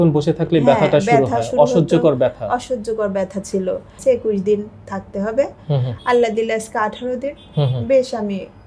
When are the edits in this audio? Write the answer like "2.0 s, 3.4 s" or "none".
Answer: 4.0 s